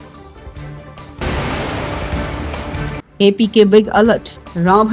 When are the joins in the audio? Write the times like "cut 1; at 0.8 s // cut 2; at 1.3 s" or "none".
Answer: cut 1; at 1.2 s // cut 2; at 2.7 s